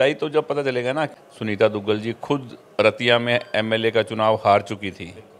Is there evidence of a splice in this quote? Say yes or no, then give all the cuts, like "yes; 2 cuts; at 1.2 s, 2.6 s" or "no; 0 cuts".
yes; 1 cut; at 1.2 s